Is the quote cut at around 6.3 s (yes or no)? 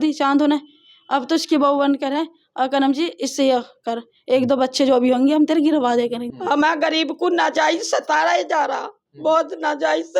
yes